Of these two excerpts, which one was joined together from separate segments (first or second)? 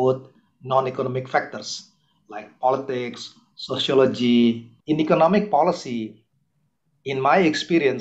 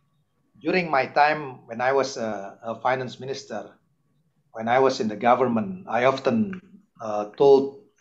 first